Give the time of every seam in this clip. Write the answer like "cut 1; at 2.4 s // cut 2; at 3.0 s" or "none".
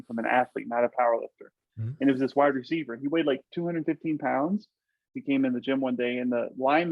cut 1; at 3.4 s // cut 2; at 5.1 s